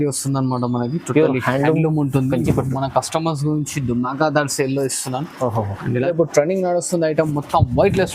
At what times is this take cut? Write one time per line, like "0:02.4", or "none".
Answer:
0:06.0

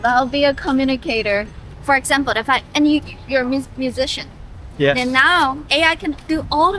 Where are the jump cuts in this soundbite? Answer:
0:01.6

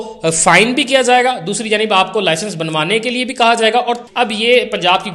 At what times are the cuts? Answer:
0:04.1

